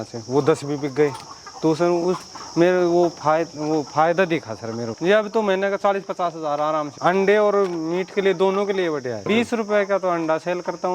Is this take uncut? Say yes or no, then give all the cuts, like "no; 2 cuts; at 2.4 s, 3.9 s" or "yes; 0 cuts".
no; 3 cuts; at 4.9 s, 6.9 s, 9.2 s